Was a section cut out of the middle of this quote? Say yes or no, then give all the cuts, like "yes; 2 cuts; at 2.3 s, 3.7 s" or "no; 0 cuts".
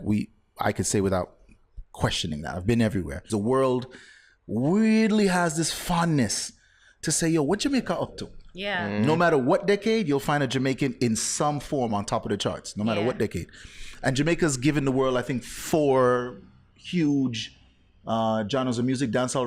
yes; 1 cut; at 3.3 s